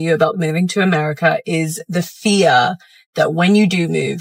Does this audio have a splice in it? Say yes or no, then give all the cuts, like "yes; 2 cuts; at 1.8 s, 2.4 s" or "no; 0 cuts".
no; 0 cuts